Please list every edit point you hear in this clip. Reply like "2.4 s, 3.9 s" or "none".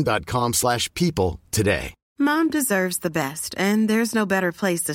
2.0 s